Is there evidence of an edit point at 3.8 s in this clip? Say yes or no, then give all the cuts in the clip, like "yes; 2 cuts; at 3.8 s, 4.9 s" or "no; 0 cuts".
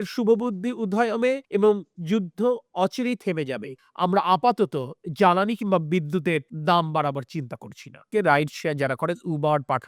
yes; 2 cuts; at 3.8 s, 8.1 s